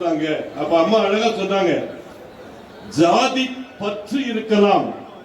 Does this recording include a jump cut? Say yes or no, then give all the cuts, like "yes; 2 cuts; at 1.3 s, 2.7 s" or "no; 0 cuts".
no; 0 cuts